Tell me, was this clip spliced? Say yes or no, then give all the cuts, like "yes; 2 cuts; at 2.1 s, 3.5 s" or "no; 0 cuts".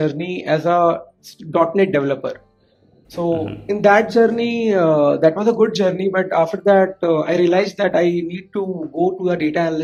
no; 0 cuts